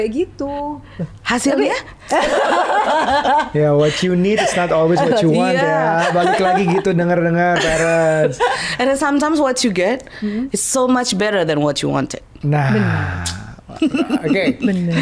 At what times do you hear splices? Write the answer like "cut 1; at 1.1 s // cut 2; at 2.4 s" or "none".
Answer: none